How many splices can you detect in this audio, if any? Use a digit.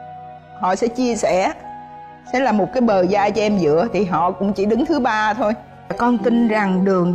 1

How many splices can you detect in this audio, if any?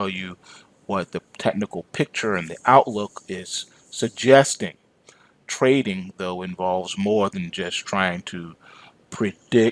0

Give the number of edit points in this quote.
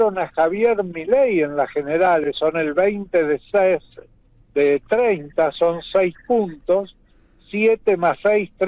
0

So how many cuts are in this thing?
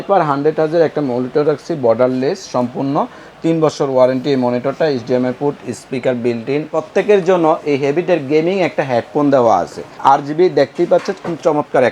2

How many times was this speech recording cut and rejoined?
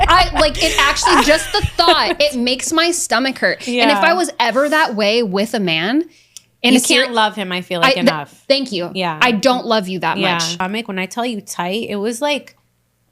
1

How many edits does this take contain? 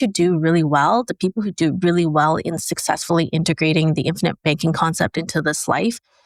0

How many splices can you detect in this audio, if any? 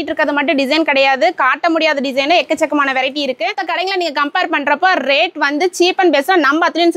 1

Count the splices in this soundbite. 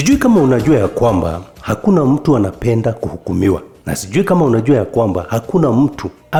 0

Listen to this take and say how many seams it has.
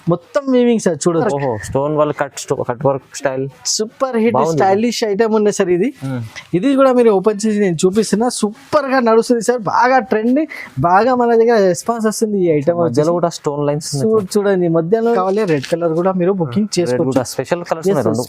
2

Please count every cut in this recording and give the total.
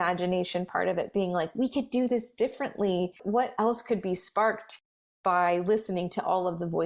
1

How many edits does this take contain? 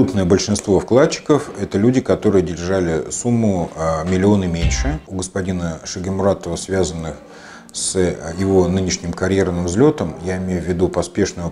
1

